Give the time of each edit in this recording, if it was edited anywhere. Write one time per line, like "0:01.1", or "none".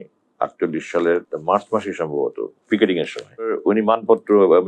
0:01.3
0:03.6